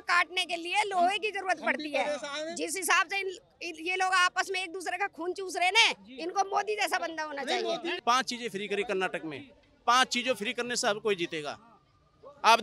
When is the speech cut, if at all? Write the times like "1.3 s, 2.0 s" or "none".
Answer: 8.0 s